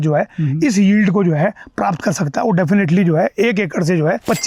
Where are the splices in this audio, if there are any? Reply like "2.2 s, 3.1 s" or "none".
none